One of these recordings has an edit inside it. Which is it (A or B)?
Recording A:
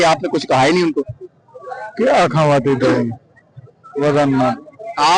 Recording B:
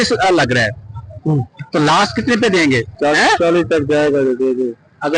B